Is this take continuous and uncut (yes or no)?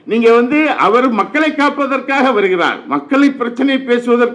yes